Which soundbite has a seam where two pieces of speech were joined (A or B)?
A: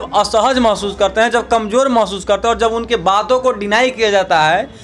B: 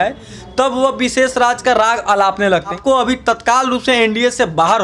B